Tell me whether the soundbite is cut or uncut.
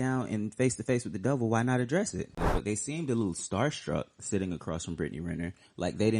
cut